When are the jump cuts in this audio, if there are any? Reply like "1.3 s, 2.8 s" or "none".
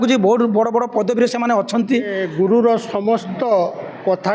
2.2 s